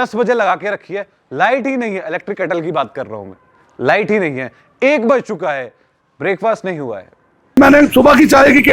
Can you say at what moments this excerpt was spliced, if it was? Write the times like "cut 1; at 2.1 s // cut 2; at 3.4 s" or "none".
cut 1; at 7.6 s